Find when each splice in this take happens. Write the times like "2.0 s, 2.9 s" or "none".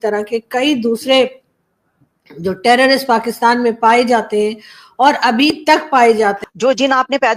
6.4 s